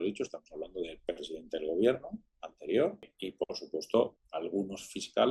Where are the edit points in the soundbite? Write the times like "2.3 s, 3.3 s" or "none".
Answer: 3.2 s, 4.2 s